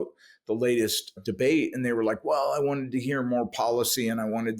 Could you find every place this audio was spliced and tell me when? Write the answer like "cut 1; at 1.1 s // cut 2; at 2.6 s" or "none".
cut 1; at 1.2 s